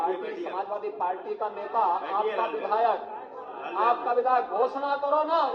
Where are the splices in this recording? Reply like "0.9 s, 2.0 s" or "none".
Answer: none